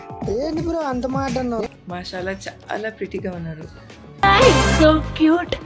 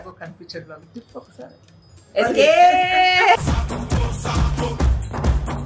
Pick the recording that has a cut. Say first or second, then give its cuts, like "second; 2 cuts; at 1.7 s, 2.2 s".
first; 1 cut; at 1.7 s